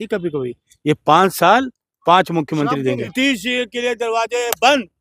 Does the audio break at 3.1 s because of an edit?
yes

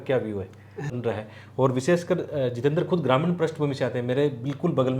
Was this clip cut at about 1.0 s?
yes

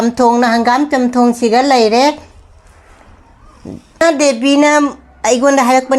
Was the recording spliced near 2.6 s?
no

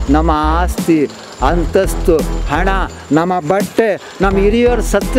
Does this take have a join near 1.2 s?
no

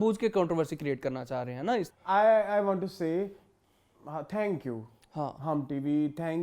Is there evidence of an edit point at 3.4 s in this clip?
no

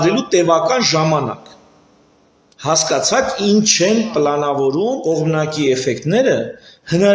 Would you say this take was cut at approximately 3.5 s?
no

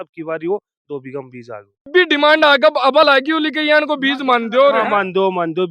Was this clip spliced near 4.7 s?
no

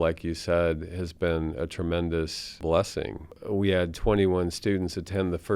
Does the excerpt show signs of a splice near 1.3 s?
no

